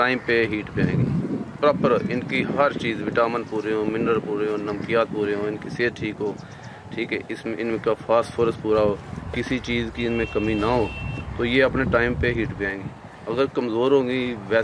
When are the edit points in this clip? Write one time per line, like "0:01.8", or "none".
none